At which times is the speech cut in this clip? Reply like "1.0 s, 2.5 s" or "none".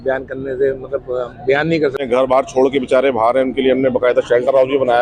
2.0 s